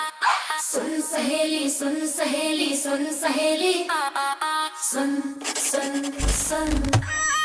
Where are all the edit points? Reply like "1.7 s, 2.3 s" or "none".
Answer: none